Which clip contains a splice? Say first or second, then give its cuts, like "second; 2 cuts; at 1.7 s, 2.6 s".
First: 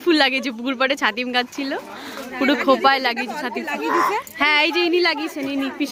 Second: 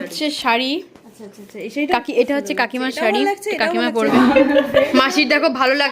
second; 1 cut; at 4.1 s